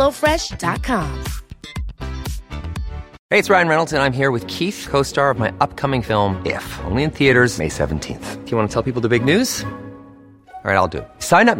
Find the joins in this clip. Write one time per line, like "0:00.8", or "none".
0:03.1

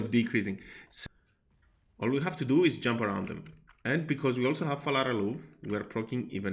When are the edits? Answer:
0:01.0

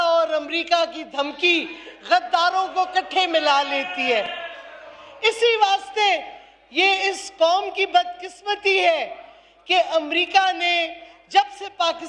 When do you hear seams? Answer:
none

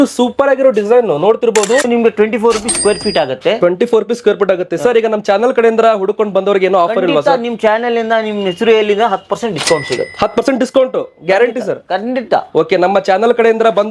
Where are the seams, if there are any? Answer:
0:01.9

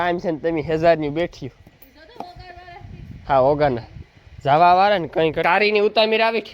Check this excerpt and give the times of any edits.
0:05.4

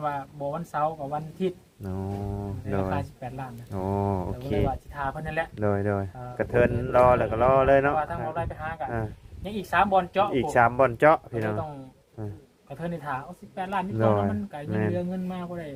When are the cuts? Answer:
none

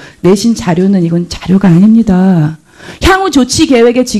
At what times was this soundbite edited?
0:01.4

